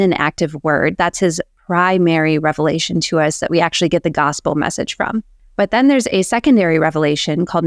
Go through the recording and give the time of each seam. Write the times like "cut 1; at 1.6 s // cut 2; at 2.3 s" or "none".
cut 1; at 5.4 s